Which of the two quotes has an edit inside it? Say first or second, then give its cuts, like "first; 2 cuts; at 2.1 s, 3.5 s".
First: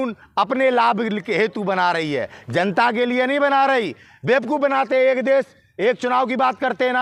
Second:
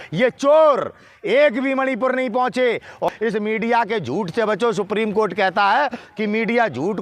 second; 1 cut; at 3.1 s